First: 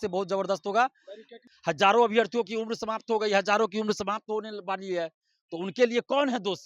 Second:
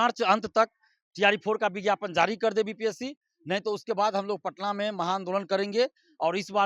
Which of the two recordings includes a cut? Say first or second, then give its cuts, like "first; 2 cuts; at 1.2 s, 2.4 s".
first; 1 cut; at 1.5 s